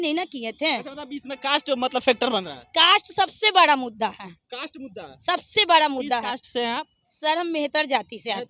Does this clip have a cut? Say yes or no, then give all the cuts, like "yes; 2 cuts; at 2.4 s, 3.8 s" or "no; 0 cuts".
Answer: no; 0 cuts